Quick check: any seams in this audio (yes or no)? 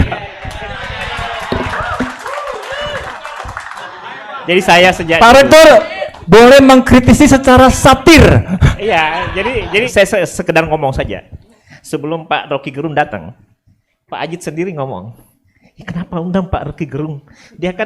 yes